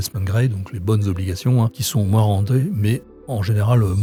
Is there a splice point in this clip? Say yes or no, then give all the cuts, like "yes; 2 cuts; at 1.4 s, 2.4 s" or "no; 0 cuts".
no; 0 cuts